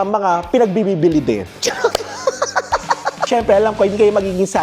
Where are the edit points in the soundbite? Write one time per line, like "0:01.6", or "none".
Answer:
0:03.2